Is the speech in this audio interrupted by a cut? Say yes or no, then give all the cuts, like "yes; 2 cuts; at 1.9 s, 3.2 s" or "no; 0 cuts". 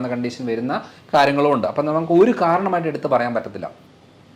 no; 0 cuts